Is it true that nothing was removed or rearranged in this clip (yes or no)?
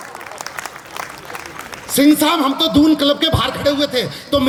yes